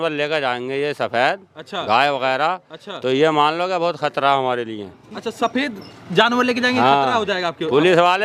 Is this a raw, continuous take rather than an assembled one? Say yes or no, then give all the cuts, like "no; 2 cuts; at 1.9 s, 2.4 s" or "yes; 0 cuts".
yes; 0 cuts